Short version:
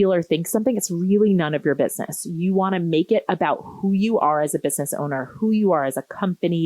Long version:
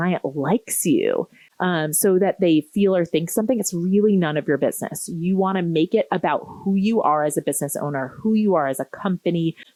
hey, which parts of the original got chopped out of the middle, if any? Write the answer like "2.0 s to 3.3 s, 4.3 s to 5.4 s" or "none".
none